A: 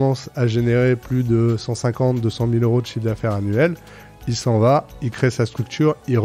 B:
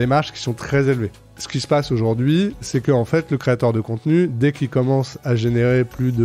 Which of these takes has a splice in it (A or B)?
B